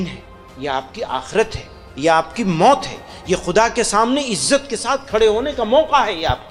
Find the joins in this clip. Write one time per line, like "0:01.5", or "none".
none